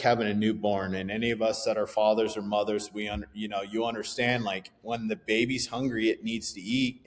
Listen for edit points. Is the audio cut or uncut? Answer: uncut